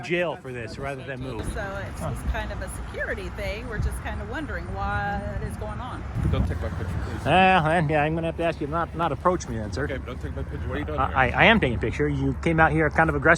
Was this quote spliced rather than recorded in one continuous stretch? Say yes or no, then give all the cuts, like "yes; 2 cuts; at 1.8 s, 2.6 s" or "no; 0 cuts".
yes; 2 cuts; at 1.5 s, 6.1 s